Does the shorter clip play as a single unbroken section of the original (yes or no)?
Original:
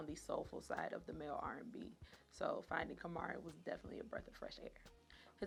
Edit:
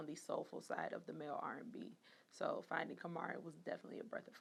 yes